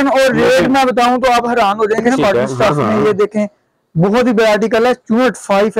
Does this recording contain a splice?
yes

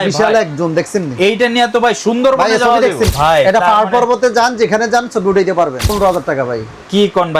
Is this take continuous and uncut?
no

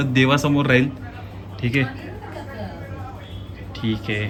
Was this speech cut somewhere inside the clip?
no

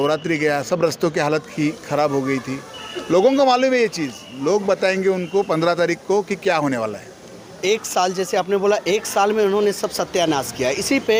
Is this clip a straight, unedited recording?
yes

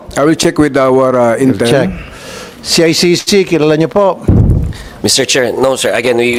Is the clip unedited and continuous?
yes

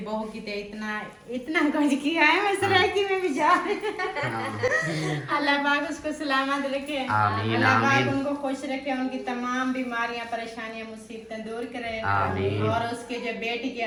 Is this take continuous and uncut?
yes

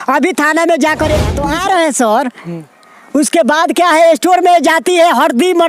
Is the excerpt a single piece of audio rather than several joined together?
no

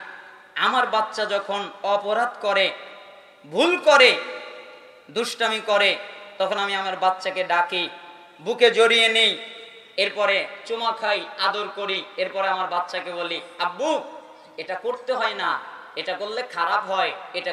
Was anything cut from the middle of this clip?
no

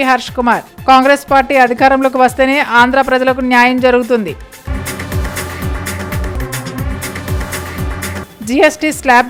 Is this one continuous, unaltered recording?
yes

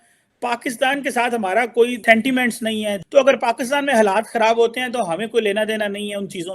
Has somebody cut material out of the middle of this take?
yes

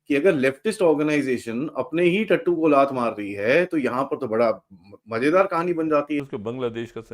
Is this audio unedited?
no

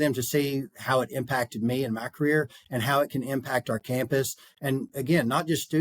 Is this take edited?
no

